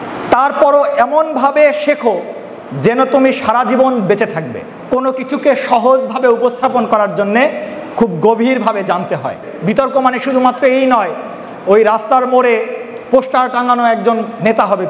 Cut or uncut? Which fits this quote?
cut